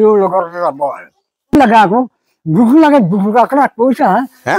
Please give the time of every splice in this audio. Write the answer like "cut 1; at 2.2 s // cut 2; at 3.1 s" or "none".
cut 1; at 1.5 s